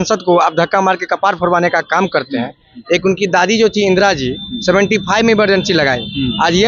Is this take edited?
no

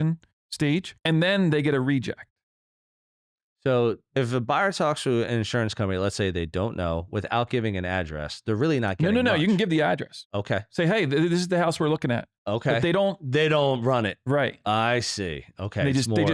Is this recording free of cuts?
no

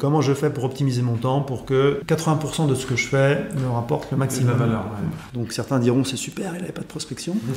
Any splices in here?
yes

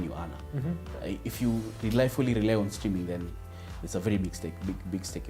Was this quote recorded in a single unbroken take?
yes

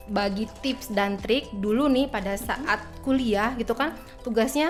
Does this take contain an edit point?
no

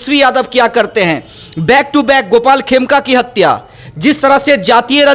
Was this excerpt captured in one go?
yes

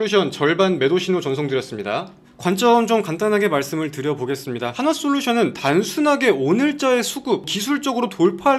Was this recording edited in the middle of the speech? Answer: yes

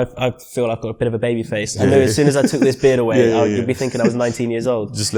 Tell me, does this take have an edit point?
no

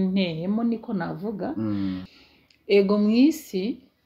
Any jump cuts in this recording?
yes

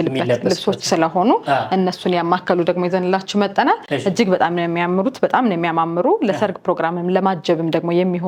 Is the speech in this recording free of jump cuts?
yes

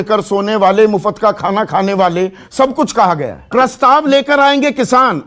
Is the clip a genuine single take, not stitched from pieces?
yes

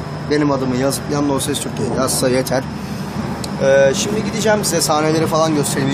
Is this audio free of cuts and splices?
no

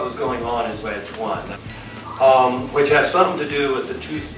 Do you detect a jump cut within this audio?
yes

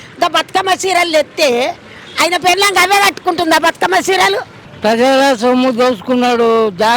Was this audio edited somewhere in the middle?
yes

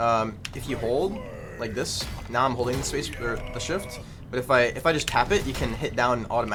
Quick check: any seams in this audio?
no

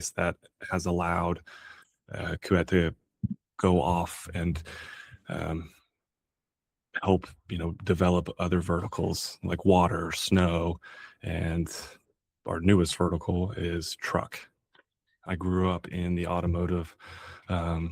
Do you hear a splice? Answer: yes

